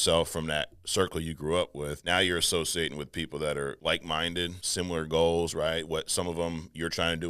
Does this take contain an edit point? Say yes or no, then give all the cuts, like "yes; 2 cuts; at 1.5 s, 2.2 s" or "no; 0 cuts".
yes; 3 cuts; at 2.0 s, 3.8 s, 4.6 s